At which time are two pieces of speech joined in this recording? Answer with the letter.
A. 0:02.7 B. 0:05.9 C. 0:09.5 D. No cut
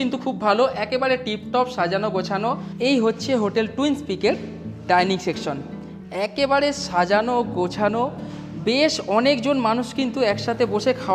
A